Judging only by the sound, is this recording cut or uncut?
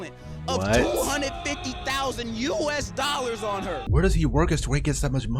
cut